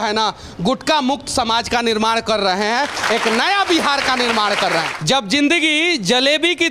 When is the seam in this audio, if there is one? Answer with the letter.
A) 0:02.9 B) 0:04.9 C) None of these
B